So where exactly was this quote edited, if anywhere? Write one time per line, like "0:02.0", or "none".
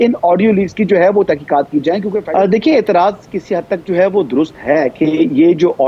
0:02.2